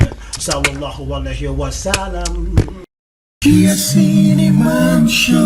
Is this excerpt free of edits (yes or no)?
no